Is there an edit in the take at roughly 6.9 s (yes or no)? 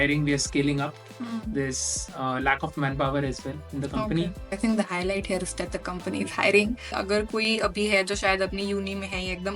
yes